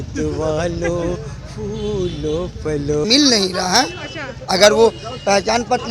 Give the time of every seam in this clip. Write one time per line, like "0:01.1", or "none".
0:03.0